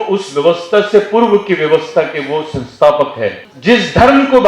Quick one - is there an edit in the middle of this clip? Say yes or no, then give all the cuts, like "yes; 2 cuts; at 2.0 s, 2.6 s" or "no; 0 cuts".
yes; 1 cut; at 3.5 s